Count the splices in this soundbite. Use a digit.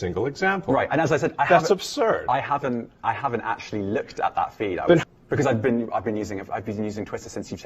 1